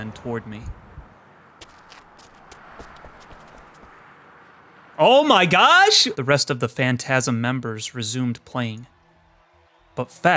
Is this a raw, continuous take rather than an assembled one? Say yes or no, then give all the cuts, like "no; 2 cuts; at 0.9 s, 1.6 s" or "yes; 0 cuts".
no; 1 cut; at 6.1 s